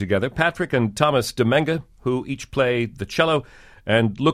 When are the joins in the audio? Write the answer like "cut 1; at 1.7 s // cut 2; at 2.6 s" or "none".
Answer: none